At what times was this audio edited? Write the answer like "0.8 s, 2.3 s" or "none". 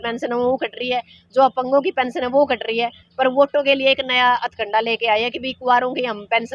none

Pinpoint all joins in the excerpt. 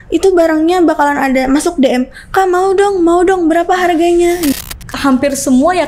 4.5 s

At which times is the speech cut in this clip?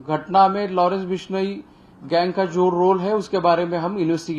none

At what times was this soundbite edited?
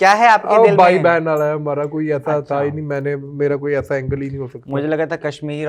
none

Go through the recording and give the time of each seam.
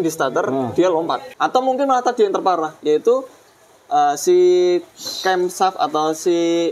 1.3 s

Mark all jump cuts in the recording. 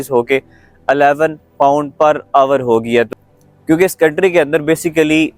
3.3 s

